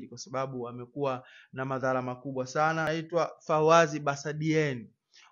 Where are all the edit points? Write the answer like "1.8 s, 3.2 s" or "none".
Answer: 2.9 s